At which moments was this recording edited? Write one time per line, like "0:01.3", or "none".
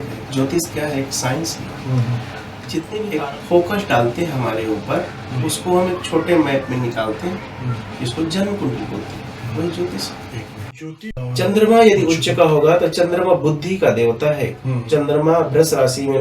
0:03.0
0:11.2